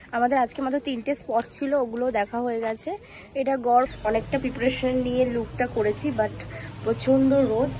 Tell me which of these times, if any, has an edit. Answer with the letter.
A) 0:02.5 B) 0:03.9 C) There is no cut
B